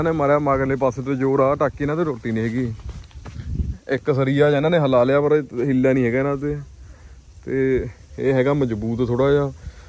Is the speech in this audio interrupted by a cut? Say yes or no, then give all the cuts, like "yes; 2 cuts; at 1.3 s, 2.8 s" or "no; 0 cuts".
no; 0 cuts